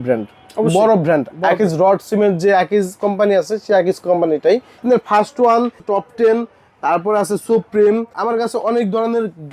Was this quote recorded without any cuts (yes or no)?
no